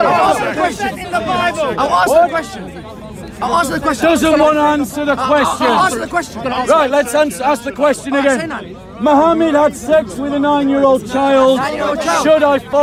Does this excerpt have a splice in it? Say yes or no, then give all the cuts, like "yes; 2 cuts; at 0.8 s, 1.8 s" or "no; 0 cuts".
no; 0 cuts